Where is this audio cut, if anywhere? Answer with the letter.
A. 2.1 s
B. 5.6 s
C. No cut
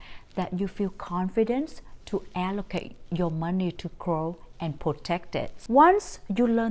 B